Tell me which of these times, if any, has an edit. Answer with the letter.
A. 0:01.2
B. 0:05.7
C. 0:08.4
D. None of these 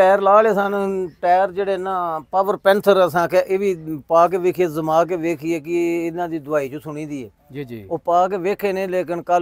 D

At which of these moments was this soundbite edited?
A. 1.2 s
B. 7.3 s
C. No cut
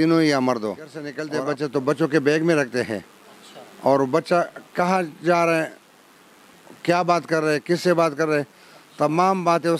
A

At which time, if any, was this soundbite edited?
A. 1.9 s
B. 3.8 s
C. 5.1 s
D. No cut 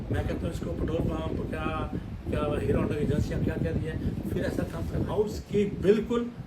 C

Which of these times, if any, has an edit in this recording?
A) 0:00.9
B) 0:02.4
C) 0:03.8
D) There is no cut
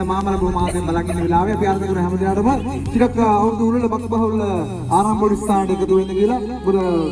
D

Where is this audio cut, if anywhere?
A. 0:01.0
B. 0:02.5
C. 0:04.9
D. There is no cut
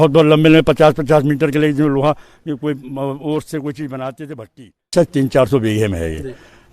C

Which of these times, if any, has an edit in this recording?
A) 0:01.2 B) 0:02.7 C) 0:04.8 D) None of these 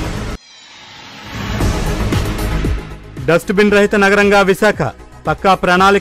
D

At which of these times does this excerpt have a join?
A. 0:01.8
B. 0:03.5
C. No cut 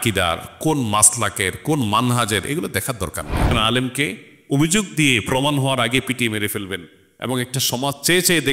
B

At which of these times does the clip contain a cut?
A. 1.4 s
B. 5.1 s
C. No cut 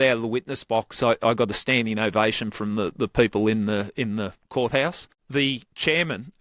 B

